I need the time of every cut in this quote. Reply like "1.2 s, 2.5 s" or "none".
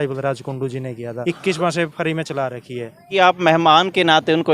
1.1 s, 3.1 s